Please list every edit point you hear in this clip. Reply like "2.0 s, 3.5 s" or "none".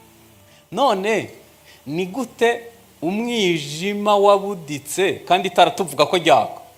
none